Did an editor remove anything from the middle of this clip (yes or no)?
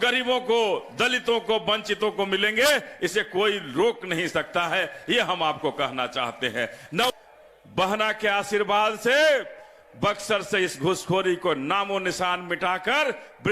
yes